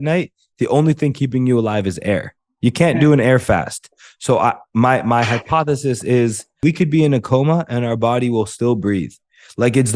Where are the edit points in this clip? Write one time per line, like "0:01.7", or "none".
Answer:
0:06.6